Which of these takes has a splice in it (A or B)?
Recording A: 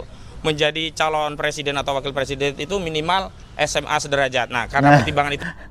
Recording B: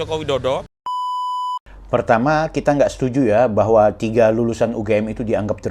B